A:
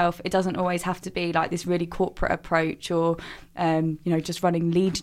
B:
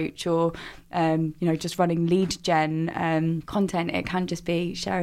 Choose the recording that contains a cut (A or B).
B